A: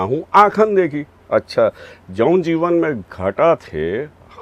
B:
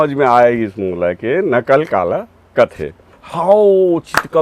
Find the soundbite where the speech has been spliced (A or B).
B